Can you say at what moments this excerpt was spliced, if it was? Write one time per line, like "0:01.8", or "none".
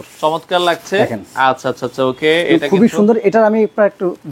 none